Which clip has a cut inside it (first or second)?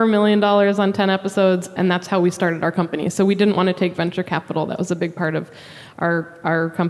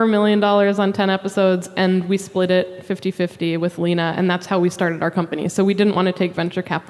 first